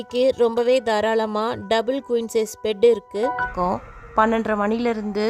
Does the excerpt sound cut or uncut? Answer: cut